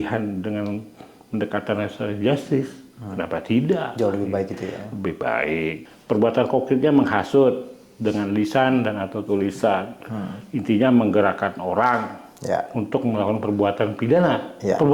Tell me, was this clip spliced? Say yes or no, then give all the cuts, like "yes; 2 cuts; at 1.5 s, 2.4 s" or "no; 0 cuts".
yes; 1 cut; at 5.8 s